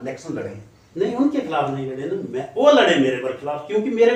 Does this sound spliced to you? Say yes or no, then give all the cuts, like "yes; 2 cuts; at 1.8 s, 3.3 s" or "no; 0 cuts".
no; 0 cuts